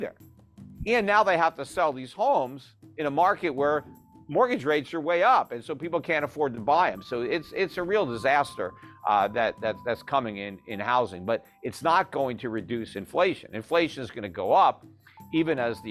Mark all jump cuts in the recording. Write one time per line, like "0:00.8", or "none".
none